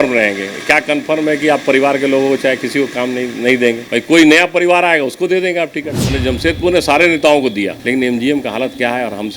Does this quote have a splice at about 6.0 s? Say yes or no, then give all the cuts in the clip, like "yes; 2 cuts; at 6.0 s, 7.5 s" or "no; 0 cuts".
yes; 2 cuts; at 6.0 s, 7.8 s